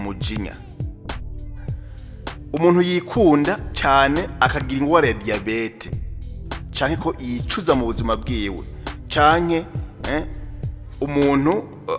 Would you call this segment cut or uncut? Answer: uncut